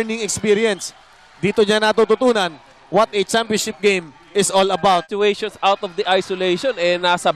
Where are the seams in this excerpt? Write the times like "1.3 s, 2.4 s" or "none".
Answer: 5.1 s